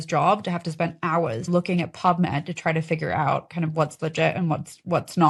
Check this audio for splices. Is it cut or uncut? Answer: uncut